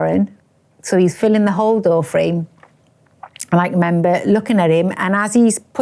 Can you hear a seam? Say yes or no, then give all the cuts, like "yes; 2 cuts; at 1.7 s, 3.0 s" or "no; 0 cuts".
no; 0 cuts